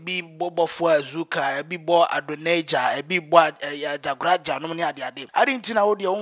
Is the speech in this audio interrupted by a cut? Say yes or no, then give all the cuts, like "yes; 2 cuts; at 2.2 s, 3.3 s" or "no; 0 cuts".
yes; 1 cut; at 5.1 s